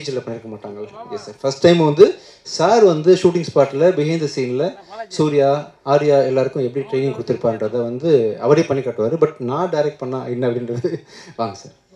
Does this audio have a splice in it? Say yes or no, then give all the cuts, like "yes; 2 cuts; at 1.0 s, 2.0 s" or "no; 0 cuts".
no; 0 cuts